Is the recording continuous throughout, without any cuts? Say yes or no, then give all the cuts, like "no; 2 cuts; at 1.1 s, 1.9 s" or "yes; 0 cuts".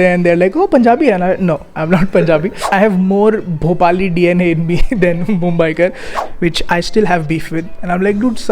no; 2 cuts; at 2.6 s, 6.1 s